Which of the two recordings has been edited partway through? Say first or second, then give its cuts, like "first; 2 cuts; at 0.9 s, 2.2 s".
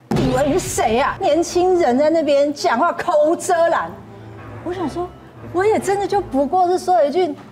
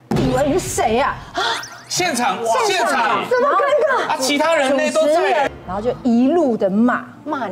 first; 1 cut; at 1.1 s